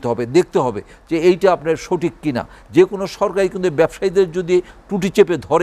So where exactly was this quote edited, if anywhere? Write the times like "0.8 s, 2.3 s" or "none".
2.5 s